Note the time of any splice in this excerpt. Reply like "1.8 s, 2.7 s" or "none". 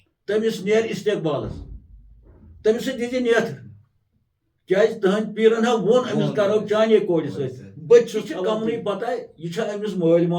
8.4 s